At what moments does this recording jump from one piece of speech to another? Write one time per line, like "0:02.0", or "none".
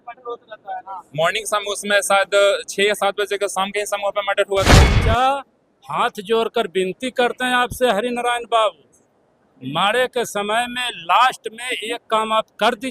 0:05.0